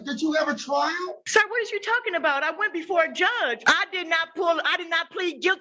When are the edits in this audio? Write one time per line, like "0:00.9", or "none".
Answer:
0:01.2
0:03.6

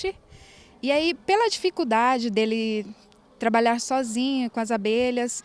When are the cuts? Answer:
none

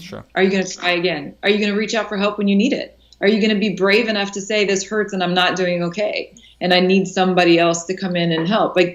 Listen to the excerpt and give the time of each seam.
none

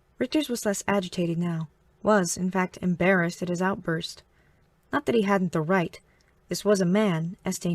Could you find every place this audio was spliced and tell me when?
0:01.6

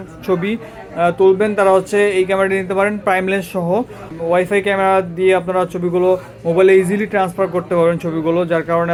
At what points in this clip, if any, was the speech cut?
none

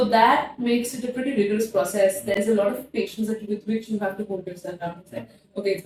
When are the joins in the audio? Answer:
none

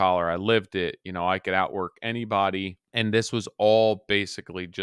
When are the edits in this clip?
0:02.8

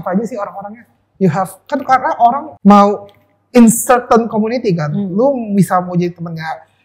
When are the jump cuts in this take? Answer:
0:02.5

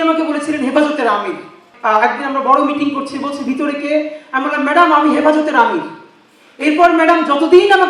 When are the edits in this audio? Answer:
0:01.7

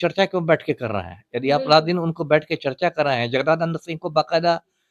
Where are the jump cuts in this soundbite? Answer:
none

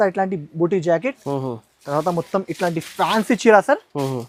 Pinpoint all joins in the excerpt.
none

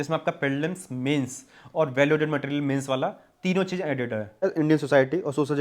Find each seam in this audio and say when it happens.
0:04.4

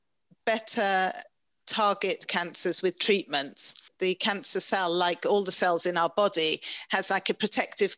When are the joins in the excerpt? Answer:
0:03.8

